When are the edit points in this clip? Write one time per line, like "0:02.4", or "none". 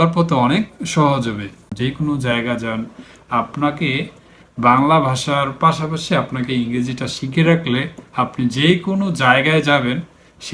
0:01.7